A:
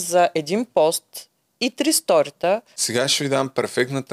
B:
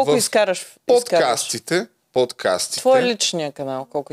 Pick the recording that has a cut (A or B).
A